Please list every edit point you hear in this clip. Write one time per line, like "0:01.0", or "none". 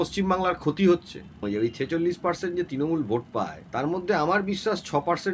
0:01.4
0:03.6